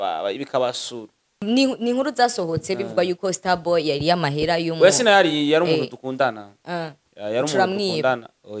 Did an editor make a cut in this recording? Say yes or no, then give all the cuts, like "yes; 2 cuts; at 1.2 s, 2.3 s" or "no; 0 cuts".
yes; 1 cut; at 1.4 s